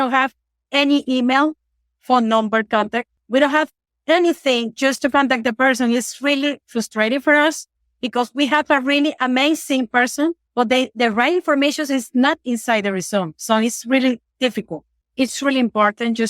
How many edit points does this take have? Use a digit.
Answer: 3